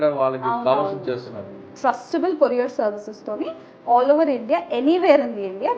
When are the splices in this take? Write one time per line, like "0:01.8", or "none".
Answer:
0:01.6

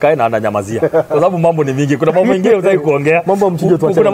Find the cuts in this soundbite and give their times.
none

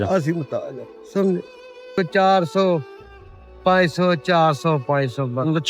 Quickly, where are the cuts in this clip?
0:01.9

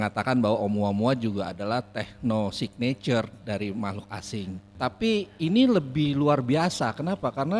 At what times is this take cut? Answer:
0:04.7

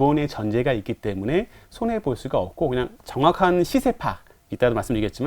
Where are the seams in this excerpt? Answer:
0:03.0

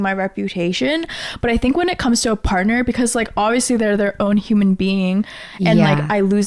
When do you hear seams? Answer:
none

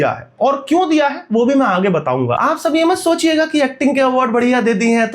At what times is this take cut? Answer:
0:02.4

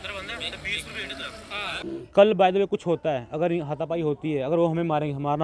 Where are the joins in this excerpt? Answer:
0:01.8

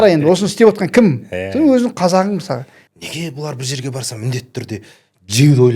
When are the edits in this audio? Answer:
0:02.8

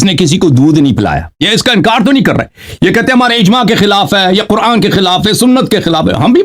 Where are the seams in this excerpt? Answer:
0:01.3

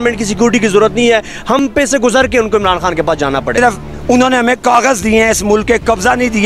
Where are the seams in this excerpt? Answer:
0:03.5

